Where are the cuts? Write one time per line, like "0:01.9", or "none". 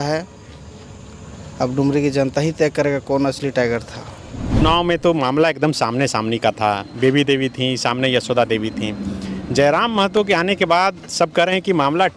0:04.6